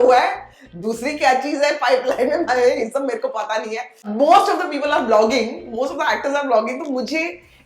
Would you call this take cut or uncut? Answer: cut